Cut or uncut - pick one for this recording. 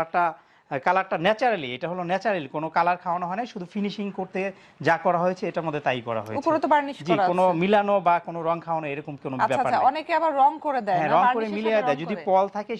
uncut